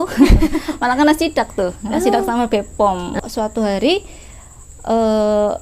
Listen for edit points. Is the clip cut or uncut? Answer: cut